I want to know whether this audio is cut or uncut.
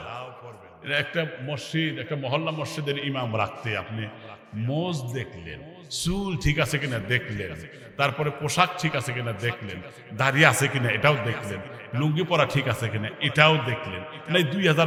uncut